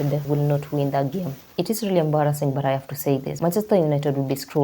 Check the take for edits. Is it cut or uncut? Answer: cut